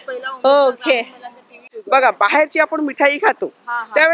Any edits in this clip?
yes; 1 cut; at 1.7 s

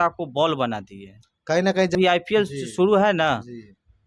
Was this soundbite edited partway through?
yes; 1 cut; at 1.9 s

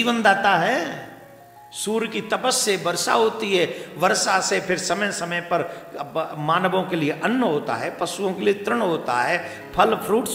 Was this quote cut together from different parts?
no; 0 cuts

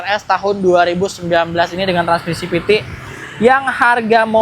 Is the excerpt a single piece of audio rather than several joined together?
yes; 0 cuts

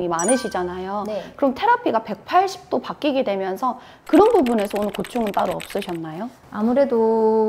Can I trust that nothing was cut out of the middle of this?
yes; 0 cuts

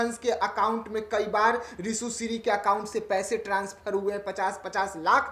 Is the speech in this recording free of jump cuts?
yes; 0 cuts

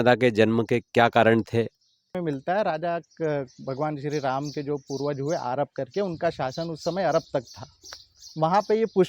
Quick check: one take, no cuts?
no; 1 cut; at 2.1 s

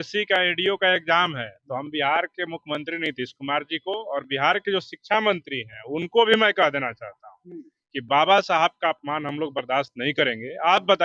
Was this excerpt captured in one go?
yes; 0 cuts

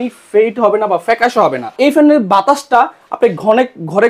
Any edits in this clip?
yes; 1 cut; at 1.7 s

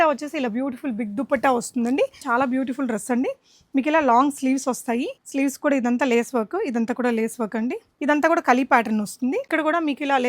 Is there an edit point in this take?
yes; 4 cuts; at 2.2 s, 5.2 s, 7.9 s, 9.5 s

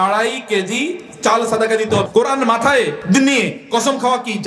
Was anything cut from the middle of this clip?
yes; 2 cuts; at 2.0 s, 3.0 s

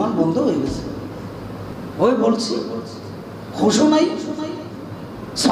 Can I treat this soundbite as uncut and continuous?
no; 1 cut; at 1.8 s

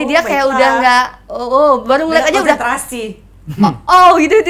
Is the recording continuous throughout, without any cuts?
yes; 0 cuts

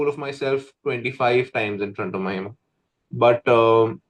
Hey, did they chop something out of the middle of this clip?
no; 0 cuts

